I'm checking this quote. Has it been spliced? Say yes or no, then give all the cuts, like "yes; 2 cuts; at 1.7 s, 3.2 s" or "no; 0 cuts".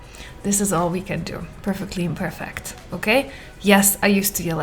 yes; 1 cut; at 1.5 s